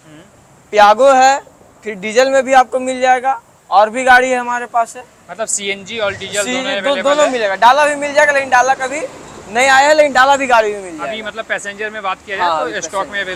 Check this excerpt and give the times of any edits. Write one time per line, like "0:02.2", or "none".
none